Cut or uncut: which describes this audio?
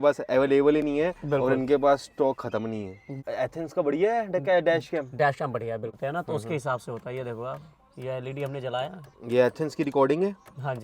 cut